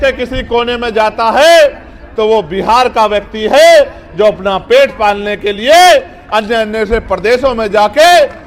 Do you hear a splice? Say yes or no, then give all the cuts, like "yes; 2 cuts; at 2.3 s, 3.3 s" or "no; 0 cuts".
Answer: no; 0 cuts